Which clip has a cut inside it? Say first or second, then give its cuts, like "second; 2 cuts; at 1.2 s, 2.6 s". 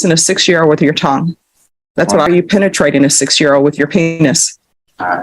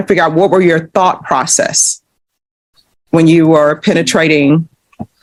first; 1 cut; at 2.3 s